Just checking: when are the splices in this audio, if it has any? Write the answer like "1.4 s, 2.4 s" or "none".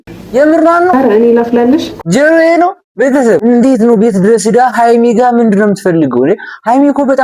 0.9 s, 2.0 s, 3.4 s